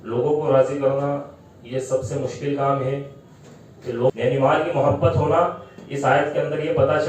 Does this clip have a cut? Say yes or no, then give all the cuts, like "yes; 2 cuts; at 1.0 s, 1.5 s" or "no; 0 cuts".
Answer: yes; 1 cut; at 4.1 s